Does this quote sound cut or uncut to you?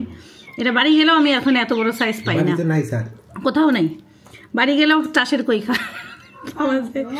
uncut